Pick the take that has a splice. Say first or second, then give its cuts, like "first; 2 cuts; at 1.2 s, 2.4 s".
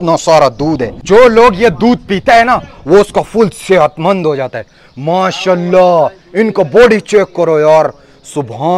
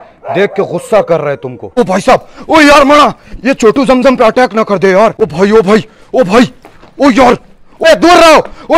second; 3 cuts; at 1.7 s, 5.2 s, 7.7 s